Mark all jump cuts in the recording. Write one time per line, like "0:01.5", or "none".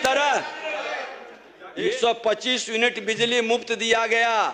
0:01.9